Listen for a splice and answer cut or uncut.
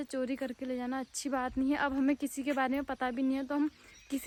uncut